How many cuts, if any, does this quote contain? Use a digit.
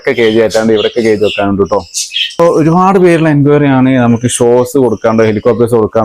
1